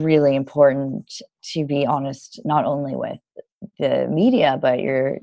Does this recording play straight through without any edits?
yes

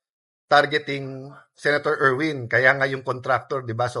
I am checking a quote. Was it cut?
no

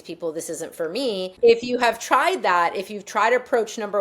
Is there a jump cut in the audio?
yes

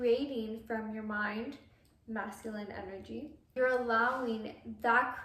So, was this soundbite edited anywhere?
yes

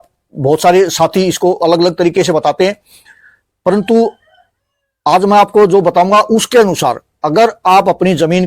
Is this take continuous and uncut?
yes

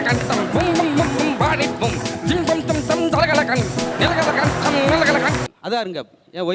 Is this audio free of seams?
no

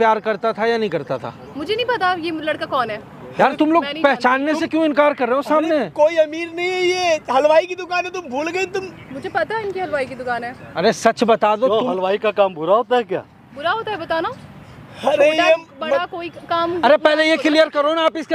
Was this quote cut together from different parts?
no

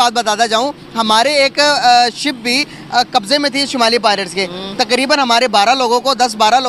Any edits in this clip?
no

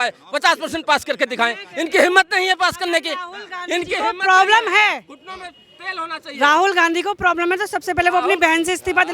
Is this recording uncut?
yes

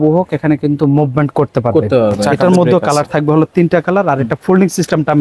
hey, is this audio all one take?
no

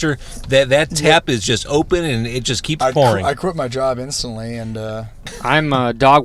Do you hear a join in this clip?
yes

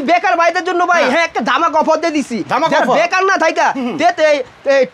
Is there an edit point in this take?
no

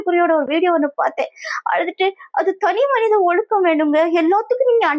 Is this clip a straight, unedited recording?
yes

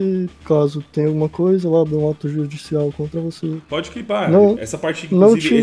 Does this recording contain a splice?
no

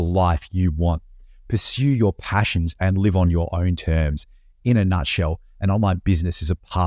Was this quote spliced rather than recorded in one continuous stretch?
no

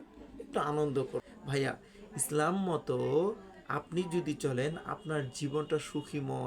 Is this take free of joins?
no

